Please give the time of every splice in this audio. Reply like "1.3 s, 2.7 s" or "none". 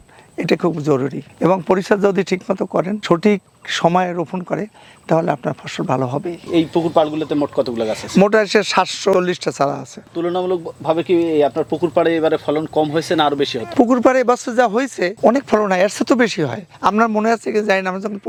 none